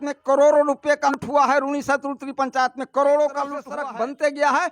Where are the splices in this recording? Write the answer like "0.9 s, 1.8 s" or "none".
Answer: 1.1 s, 3.6 s